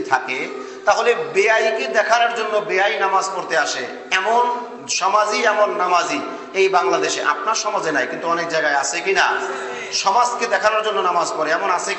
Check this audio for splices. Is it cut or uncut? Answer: uncut